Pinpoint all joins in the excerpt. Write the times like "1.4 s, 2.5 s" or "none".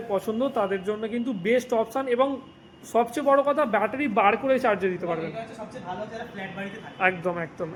none